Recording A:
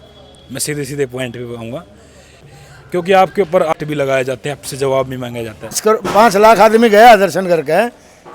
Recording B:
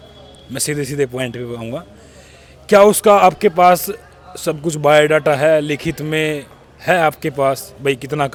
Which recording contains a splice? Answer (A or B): A